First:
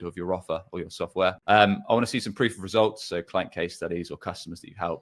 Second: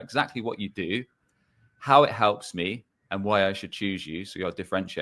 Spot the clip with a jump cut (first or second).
first